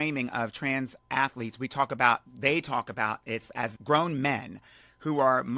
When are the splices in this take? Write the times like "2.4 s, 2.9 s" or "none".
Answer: 3.7 s